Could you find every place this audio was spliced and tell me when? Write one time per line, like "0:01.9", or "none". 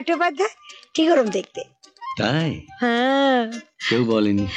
none